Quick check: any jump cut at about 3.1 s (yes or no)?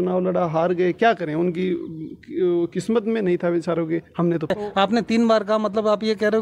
no